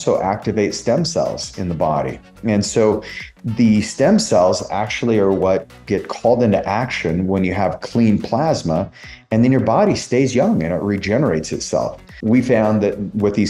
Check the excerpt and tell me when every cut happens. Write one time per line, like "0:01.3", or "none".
0:12.1

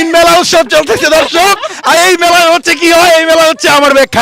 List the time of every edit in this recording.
none

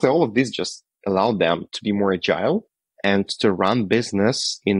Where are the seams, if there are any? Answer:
none

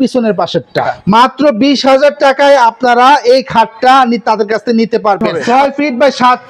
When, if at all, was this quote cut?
0:00.9
0:05.3

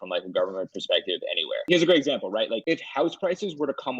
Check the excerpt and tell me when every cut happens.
0:01.5
0:02.6

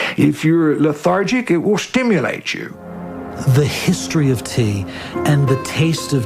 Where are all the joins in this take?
0:04.8

